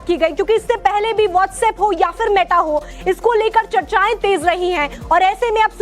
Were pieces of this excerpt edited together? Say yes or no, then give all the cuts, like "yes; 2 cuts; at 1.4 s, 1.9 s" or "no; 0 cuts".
yes; 1 cut; at 1.8 s